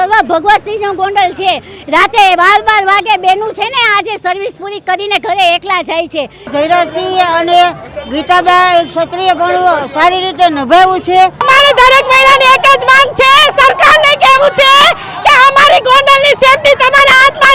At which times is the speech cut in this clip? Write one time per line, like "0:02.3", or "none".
0:06.5
0:11.4